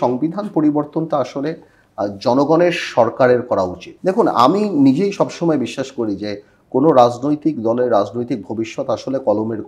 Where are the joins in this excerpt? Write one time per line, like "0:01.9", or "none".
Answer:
0:03.8